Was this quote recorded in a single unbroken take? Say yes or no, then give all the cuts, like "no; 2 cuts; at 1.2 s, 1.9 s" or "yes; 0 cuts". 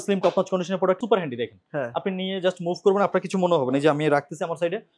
no; 1 cut; at 1.0 s